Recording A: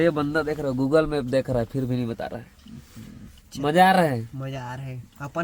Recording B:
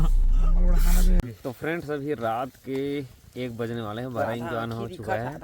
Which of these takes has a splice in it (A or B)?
B